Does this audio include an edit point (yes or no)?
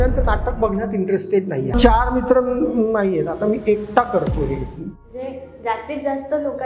yes